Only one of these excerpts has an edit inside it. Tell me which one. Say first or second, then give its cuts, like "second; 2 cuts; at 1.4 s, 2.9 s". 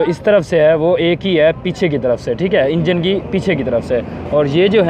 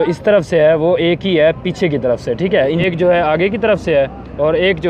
second; 1 cut; at 2.8 s